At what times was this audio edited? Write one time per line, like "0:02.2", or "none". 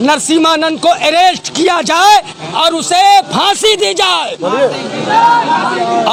none